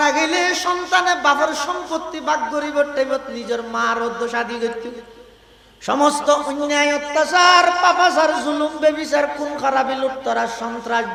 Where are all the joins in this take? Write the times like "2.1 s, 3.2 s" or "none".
none